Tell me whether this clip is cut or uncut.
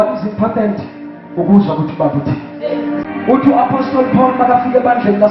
cut